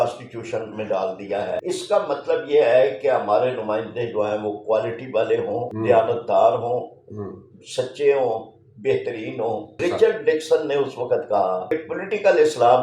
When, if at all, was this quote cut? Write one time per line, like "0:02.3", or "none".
0:01.6
0:05.7
0:09.8
0:11.7